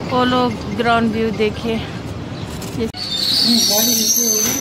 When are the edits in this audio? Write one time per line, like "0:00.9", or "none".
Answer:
0:02.9